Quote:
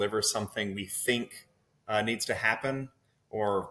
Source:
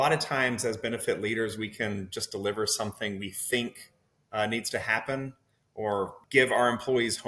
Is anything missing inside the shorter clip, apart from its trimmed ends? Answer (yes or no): no